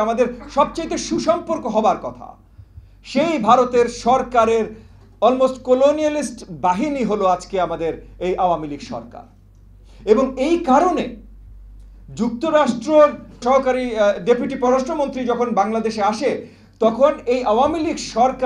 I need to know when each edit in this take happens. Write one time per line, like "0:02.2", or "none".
0:13.4

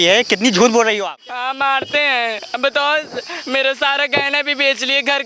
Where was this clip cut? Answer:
0:01.0

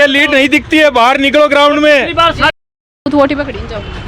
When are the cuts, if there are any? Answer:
0:02.6

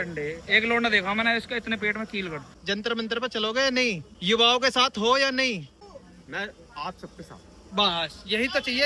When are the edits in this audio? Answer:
0:02.5
0:05.8

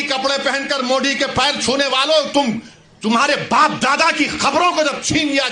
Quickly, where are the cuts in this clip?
none

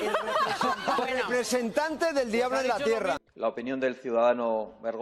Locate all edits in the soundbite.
0:03.3

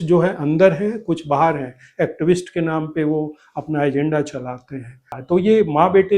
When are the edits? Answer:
0:05.1

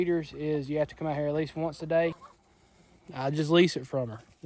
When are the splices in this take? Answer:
0:02.3

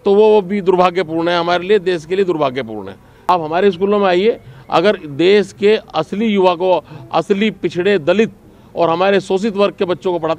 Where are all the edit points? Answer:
0:03.3

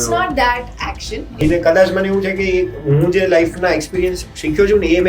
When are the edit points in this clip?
0:01.4

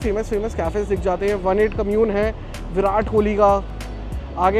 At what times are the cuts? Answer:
none

